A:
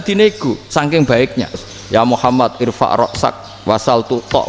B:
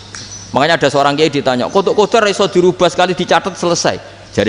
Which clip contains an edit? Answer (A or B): A